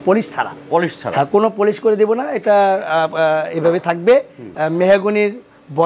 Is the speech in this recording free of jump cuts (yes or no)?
no